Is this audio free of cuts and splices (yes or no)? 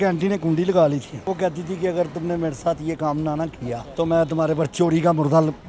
no